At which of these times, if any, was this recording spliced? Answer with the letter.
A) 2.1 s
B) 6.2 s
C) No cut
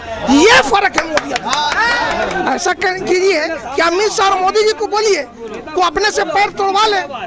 A